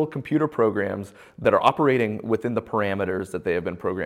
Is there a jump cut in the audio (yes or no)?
yes